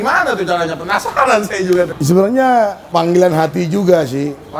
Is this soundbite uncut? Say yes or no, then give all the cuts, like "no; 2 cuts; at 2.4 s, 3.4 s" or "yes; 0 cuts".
no; 2 cuts; at 1.9 s, 2.8 s